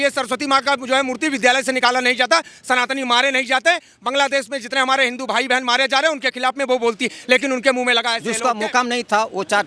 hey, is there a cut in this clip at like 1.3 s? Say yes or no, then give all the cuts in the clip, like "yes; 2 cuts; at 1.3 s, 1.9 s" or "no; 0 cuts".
no; 1 cut; at 8.3 s